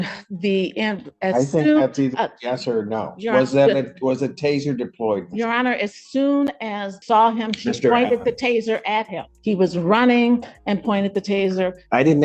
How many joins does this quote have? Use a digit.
2